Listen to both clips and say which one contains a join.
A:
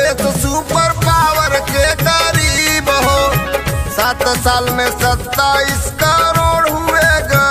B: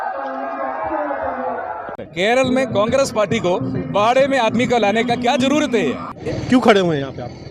B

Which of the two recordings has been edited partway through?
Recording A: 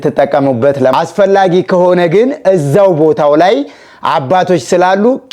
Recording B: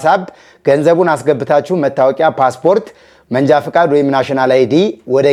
A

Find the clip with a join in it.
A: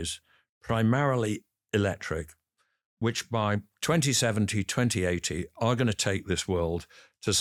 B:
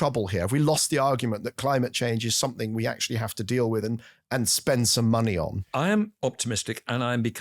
B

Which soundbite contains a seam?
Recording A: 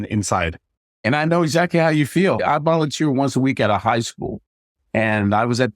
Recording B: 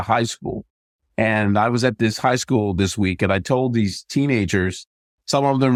A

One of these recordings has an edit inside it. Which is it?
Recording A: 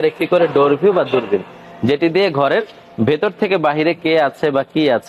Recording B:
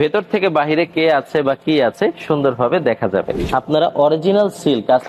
B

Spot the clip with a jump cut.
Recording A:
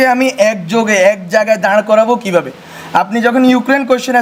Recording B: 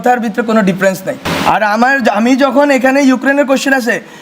B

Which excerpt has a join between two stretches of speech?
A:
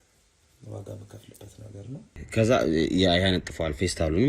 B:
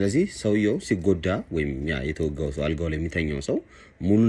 A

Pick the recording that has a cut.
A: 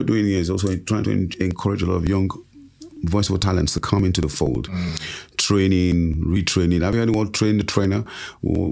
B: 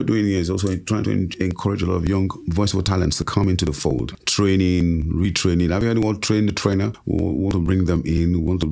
B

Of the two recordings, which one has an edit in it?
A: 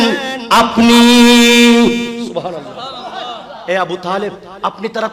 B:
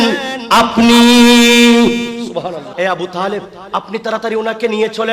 B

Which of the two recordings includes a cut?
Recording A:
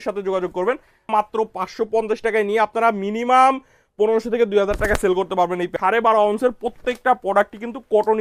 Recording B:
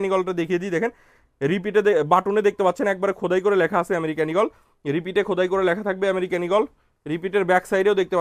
A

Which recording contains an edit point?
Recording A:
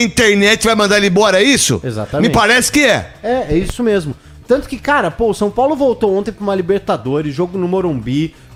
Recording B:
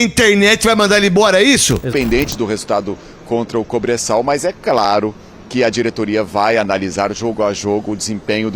B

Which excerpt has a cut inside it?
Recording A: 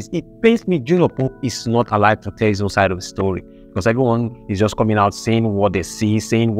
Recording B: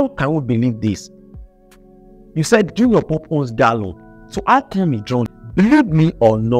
B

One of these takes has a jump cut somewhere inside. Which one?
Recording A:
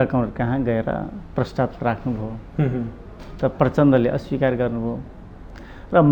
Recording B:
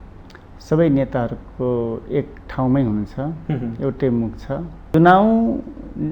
B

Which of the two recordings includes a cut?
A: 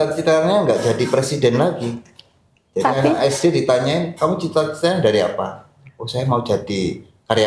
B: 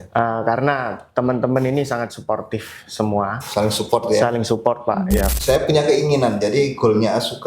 B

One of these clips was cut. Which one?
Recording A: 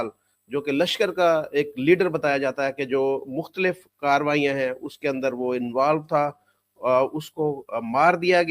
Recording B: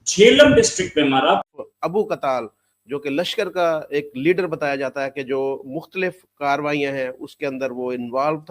B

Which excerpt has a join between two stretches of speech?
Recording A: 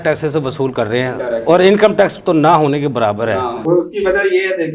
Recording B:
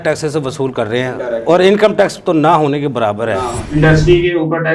B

